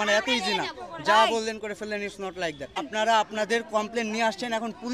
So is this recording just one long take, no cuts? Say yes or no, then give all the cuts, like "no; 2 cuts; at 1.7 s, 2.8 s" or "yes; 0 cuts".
no; 1 cut; at 2.9 s